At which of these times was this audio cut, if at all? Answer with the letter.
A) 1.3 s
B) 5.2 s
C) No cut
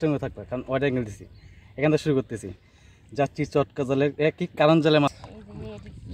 B